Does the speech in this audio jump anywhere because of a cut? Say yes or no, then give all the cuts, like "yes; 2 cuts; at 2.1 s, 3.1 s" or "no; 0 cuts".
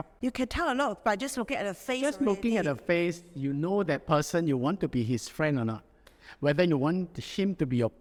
no; 0 cuts